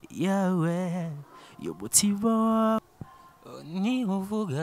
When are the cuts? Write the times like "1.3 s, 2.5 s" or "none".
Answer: 2.8 s